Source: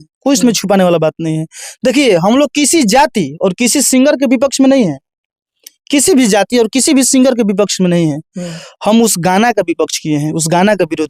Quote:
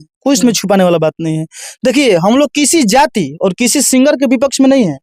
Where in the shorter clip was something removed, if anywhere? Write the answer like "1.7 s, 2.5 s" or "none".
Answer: none